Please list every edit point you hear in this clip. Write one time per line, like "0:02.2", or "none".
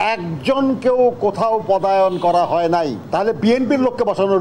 0:03.0

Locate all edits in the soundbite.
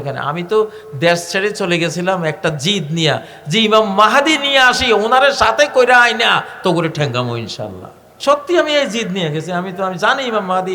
0:08.1

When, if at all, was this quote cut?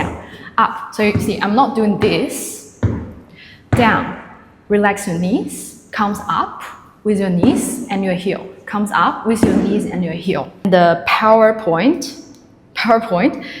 0:10.7

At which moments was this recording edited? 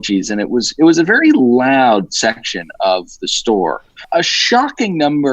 0:03.9

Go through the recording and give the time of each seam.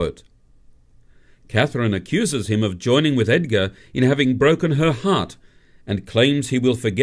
none

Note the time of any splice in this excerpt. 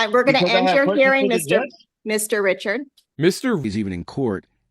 none

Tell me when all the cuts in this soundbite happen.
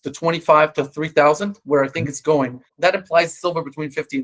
0:02.7

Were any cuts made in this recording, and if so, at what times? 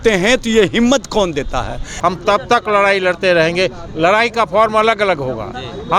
0:01.9

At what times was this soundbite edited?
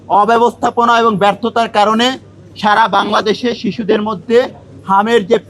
none

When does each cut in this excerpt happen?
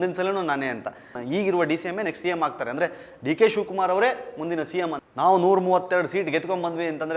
0:01.2
0:05.0

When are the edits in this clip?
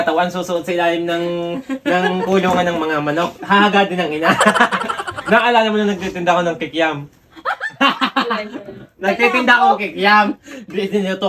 0:05.3

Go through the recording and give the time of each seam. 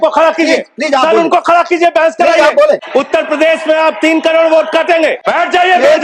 0:02.8
0:05.2

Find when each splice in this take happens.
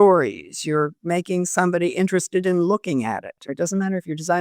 0:03.5

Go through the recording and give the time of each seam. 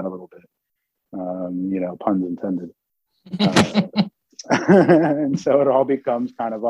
none

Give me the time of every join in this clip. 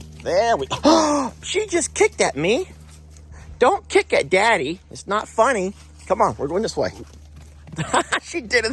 none

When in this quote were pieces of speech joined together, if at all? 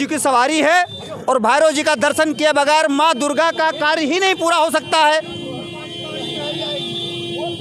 none

